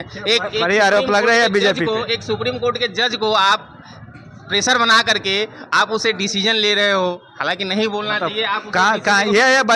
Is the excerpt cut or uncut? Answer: uncut